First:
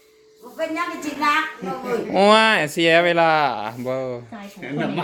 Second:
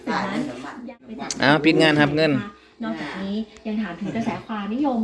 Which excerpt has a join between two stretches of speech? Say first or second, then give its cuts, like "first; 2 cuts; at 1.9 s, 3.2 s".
second; 1 cut; at 1.0 s